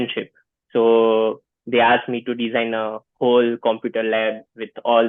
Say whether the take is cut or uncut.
uncut